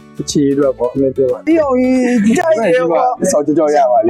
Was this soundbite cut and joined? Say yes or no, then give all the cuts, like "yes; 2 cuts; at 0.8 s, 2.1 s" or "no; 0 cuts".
yes; 1 cut; at 1.4 s